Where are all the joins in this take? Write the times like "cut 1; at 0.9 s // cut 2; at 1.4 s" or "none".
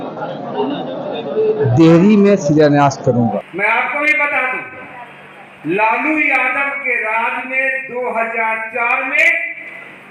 cut 1; at 3.4 s